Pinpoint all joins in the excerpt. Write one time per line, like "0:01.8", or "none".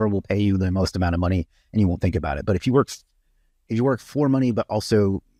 none